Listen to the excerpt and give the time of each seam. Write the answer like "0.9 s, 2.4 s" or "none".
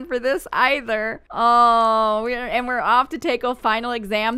none